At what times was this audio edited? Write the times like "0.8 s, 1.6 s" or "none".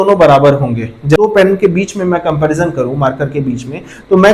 1.2 s